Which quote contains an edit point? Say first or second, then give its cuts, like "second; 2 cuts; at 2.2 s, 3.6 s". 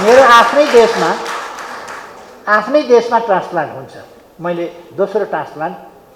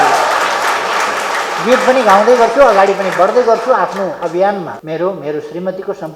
second; 1 cut; at 4.8 s